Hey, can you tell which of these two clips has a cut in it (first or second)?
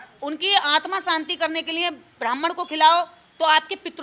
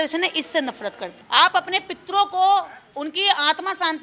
second